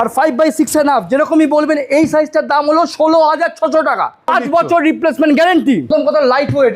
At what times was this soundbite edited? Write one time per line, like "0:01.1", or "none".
0:04.3
0:05.9